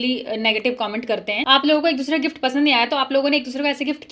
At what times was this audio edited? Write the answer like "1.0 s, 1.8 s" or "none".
1.4 s

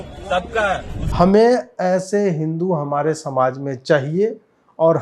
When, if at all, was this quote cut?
1.0 s

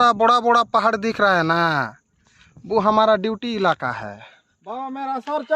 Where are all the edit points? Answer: none

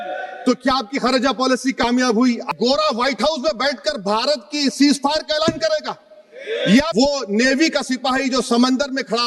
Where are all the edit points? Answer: 2.5 s, 6.9 s

